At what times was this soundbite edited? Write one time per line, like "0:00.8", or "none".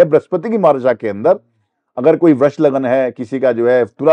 none